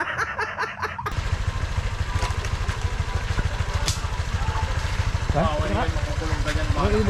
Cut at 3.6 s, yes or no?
no